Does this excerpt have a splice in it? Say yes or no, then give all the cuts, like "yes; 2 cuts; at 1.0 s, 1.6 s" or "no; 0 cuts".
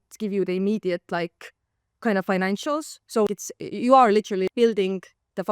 yes; 2 cuts; at 3.3 s, 4.5 s